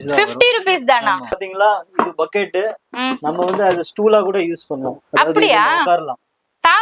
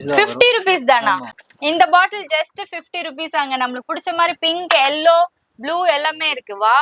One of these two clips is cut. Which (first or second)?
first